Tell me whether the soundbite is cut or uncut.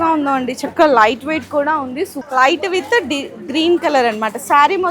cut